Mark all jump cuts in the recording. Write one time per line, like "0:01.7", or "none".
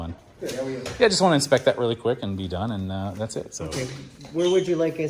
none